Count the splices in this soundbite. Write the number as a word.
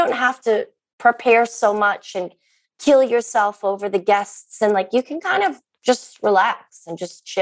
zero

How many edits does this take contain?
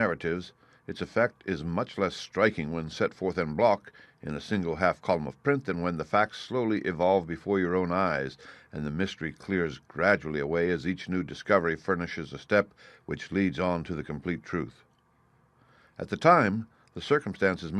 one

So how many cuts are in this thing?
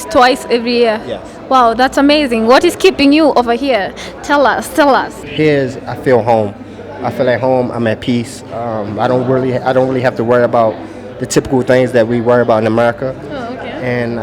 one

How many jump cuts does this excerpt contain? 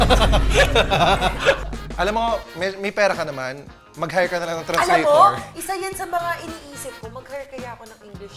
one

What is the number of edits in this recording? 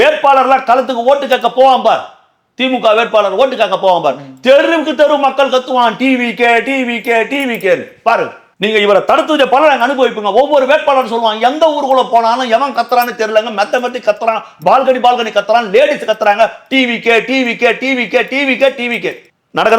zero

